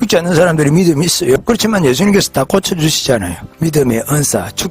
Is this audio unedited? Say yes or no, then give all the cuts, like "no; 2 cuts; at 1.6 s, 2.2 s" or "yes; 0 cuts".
no; 1 cut; at 3.5 s